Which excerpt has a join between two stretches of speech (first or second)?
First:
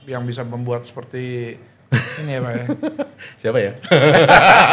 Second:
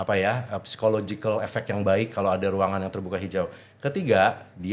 first